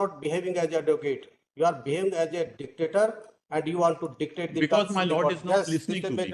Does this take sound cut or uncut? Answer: uncut